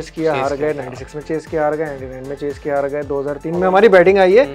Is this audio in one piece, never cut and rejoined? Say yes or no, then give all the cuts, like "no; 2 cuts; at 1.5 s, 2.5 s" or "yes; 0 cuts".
yes; 0 cuts